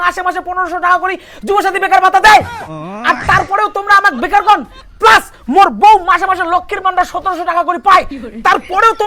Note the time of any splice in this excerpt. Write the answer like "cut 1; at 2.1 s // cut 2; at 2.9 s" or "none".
none